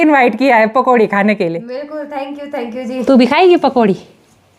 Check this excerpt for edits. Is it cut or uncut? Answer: cut